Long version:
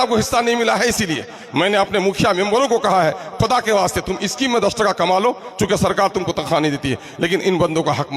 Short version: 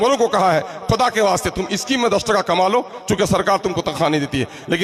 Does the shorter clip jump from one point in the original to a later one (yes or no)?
no